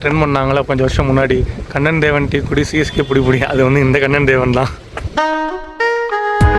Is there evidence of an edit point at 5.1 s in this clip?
no; 0 cuts

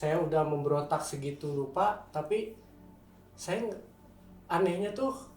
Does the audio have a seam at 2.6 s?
no; 0 cuts

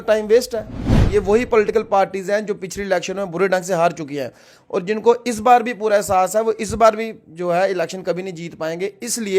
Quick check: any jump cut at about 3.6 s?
no; 1 cut; at 0.9 s

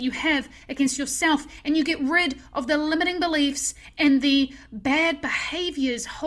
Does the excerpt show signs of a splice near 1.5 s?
no; 0 cuts

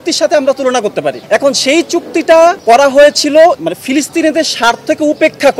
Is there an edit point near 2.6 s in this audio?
yes; 3 cuts; at 1.2 s, 2.6 s, 3.6 s

